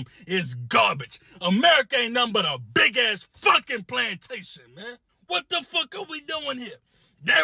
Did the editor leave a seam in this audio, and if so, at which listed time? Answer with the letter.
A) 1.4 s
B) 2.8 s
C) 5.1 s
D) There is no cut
C